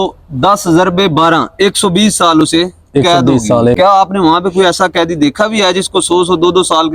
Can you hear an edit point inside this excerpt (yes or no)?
yes